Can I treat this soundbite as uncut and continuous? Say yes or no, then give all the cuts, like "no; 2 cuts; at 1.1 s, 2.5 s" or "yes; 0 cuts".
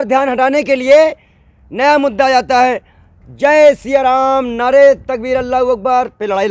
yes; 0 cuts